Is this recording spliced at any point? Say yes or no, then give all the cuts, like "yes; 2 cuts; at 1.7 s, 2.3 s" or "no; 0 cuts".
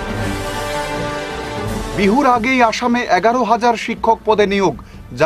yes; 1 cut; at 1.9 s